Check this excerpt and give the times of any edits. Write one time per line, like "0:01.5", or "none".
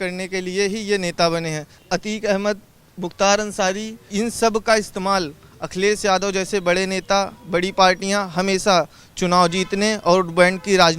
0:01.8
0:04.0